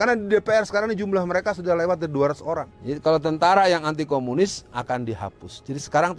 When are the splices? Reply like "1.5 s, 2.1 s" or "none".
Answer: 2.7 s